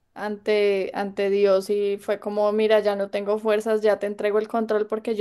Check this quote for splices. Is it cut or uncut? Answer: uncut